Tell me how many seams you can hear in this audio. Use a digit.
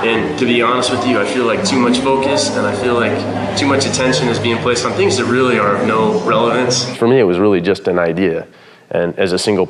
1